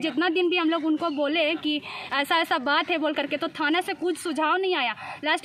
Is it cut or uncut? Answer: uncut